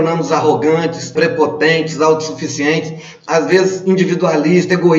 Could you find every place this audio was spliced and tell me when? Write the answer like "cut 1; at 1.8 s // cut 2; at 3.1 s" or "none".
cut 1; at 1.1 s